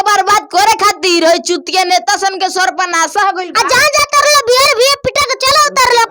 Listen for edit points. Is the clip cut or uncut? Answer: uncut